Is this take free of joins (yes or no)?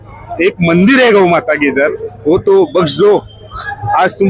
yes